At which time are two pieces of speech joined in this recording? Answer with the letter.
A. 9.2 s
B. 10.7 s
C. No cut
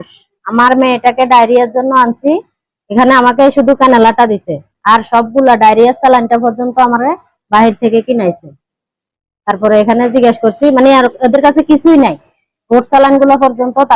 C